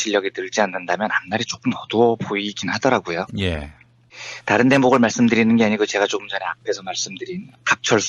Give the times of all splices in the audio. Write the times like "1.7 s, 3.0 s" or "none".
4.5 s